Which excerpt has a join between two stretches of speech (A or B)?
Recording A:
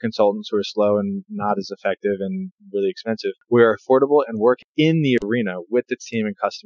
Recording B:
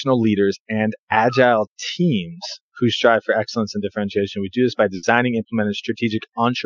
A